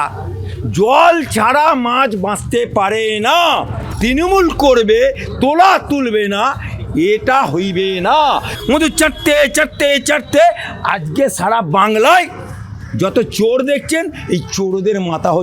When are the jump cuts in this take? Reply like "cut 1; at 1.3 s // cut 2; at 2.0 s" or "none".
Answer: cut 1; at 3.8 s // cut 2; at 8.5 s